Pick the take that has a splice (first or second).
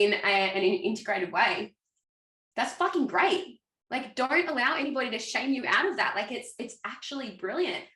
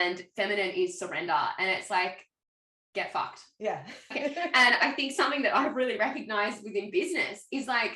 second